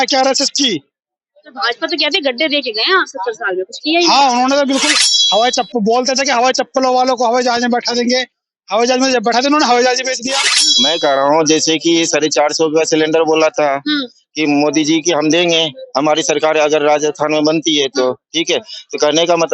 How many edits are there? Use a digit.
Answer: 1